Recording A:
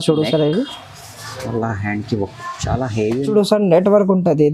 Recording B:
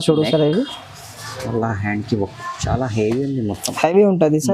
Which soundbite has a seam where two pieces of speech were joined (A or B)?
A